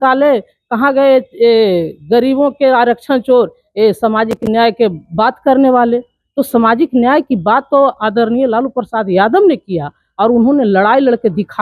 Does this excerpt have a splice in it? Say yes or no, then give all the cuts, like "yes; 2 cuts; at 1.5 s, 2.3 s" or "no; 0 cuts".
no; 0 cuts